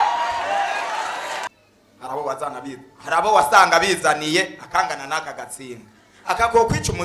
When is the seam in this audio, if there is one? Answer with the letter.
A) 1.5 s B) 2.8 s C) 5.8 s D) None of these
A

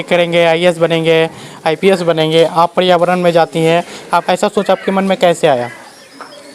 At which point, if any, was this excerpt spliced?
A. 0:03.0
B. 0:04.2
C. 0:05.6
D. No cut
B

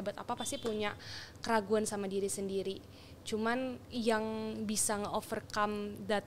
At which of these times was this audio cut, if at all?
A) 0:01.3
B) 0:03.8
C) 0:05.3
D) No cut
B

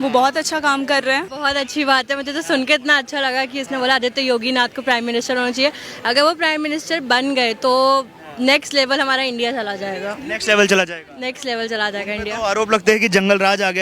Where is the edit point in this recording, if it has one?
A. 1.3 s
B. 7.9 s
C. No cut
A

